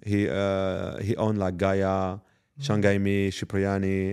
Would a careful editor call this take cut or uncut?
uncut